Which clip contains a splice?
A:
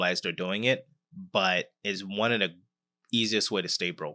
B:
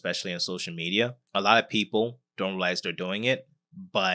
B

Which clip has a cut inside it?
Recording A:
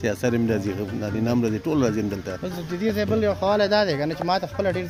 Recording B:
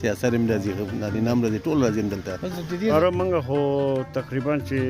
B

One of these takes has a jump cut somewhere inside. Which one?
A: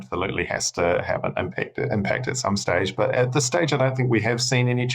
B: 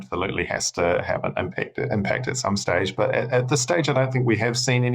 A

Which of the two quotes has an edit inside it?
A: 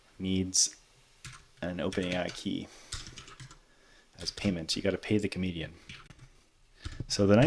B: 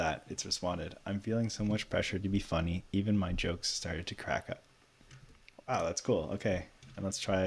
A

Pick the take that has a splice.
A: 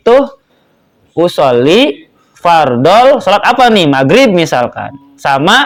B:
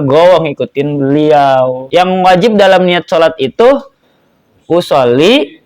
B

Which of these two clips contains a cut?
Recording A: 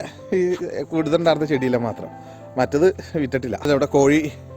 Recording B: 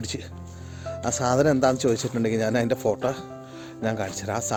A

